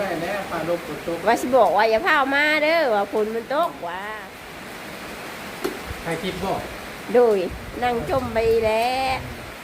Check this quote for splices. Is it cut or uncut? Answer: cut